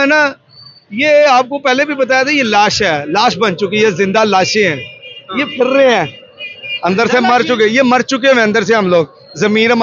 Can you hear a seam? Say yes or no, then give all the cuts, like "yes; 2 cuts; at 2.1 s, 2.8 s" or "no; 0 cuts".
no; 0 cuts